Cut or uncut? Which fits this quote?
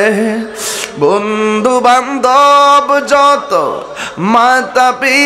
uncut